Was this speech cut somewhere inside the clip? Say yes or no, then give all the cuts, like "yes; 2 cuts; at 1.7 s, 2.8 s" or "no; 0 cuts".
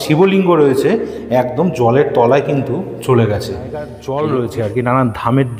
yes; 1 cut; at 4.0 s